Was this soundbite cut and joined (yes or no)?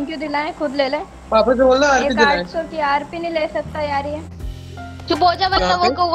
yes